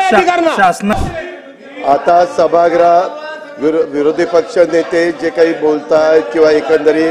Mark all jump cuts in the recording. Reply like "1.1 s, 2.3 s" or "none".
0.9 s